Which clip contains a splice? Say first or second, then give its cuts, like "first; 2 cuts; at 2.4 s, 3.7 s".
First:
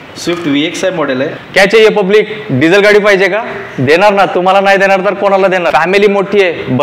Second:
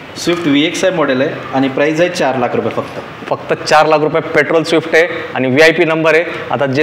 first; 2 cuts; at 1.4 s, 5.7 s